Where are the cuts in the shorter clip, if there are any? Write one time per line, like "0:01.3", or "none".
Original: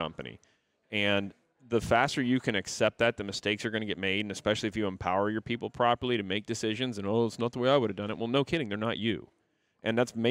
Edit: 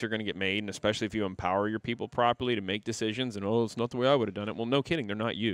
none